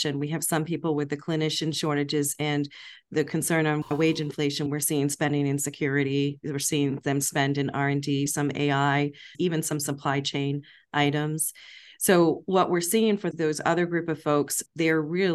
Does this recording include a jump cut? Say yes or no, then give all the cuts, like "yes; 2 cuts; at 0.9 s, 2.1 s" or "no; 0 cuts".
yes; 3 cuts; at 4.7 s, 8.3 s, 9.3 s